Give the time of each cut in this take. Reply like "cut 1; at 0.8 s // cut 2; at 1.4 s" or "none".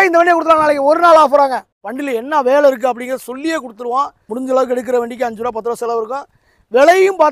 cut 1; at 1.7 s // cut 2; at 4.2 s

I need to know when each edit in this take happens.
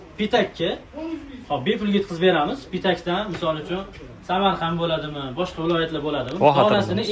none

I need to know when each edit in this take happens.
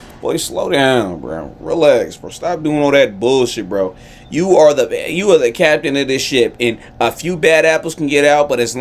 none

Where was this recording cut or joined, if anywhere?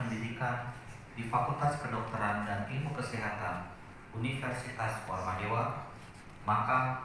none

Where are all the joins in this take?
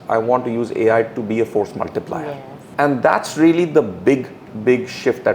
none

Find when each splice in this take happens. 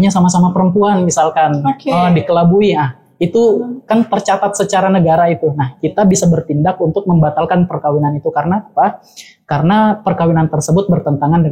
none

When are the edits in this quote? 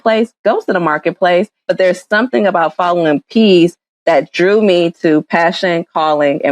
cut 1; at 1.7 s

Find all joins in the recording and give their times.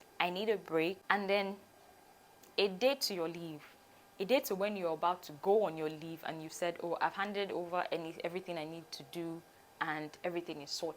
cut 1; at 1.0 s

